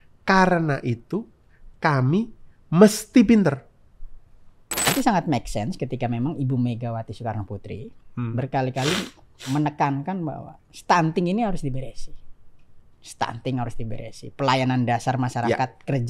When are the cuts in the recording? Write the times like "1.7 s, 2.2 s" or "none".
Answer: 4.9 s